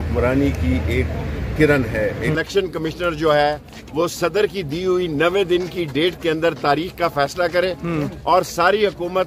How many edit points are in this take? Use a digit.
1